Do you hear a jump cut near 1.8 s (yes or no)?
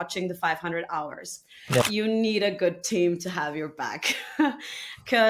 yes